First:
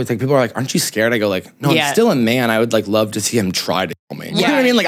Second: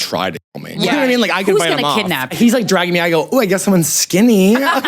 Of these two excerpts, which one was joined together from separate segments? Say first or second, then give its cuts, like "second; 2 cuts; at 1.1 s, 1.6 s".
second; 1 cut; at 2.3 s